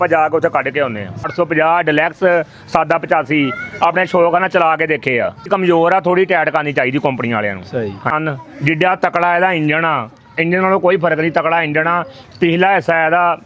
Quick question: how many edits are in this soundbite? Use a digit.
3